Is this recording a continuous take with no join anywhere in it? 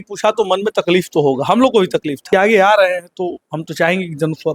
no; 1 cut; at 2.2 s

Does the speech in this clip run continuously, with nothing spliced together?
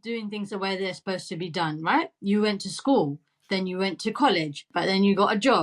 no; 1 cut; at 4.7 s

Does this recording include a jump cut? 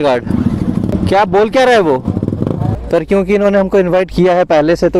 yes; 2 cuts; at 0.9 s, 2.7 s

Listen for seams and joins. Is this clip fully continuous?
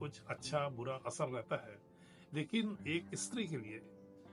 yes; 0 cuts

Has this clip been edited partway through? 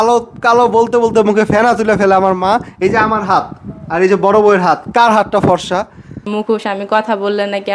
yes; 1 cut; at 6.3 s

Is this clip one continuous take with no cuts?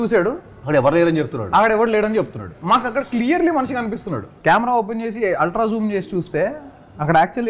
no; 1 cut; at 4.3 s

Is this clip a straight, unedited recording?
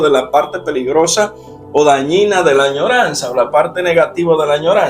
yes; 0 cuts

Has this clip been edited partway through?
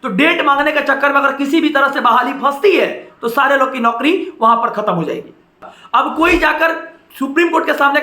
yes; 1 cut; at 5.7 s

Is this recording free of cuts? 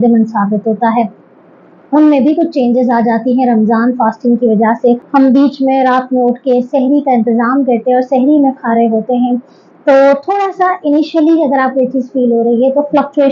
no; 1 cut; at 5.0 s

